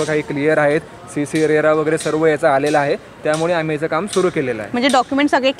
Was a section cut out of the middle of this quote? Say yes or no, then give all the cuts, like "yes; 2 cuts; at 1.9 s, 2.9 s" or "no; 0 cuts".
no; 0 cuts